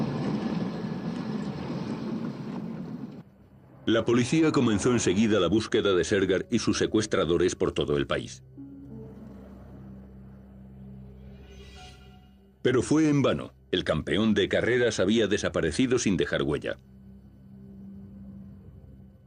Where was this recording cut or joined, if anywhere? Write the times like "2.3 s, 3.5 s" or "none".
none